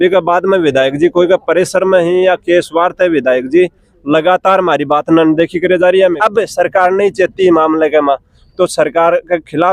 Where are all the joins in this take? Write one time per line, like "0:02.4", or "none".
0:06.2